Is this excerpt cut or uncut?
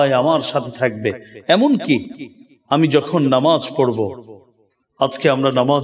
uncut